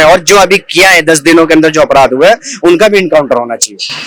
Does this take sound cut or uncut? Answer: uncut